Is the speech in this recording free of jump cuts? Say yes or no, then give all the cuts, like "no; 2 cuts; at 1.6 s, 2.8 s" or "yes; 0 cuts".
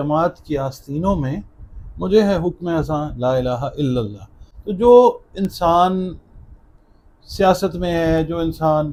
yes; 0 cuts